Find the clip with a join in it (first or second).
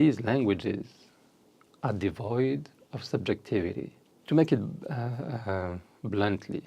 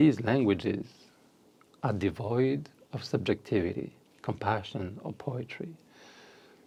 first